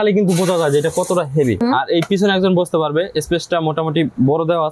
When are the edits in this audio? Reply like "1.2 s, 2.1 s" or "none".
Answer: 1.6 s

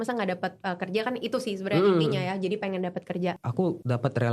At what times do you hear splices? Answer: 3.4 s

